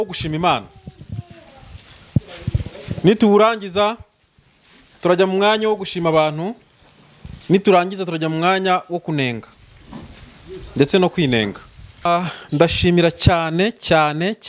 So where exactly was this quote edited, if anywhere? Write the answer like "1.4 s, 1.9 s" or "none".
12.1 s